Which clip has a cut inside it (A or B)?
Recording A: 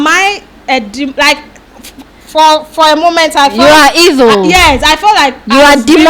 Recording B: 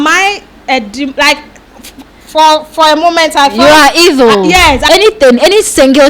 B